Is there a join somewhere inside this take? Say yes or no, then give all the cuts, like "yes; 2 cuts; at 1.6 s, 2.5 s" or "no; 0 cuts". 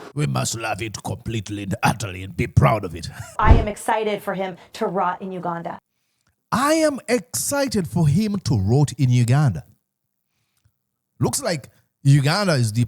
yes; 1 cut; at 3.3 s